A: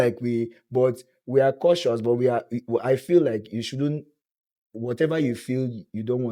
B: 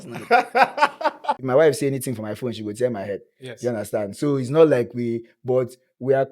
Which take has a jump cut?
B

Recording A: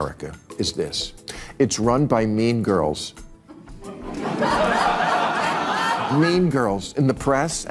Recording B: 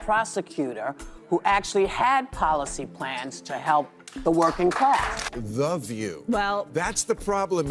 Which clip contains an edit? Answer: B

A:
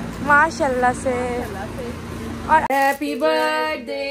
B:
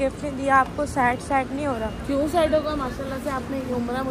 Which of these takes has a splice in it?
A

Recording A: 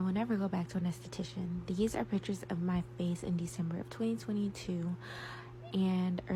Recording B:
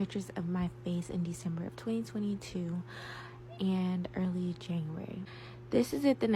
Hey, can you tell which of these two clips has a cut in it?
B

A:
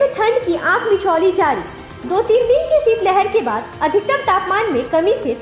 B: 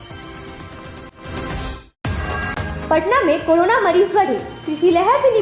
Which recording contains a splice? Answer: B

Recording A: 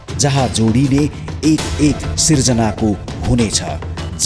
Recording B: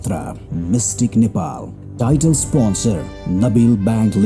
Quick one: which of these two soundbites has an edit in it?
B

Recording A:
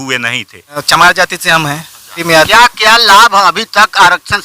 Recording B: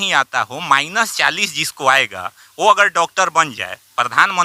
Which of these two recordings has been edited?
A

